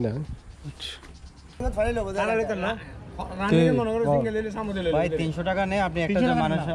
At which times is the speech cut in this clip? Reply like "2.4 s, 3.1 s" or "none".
1.6 s